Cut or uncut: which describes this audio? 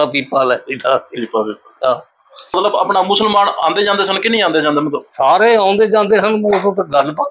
cut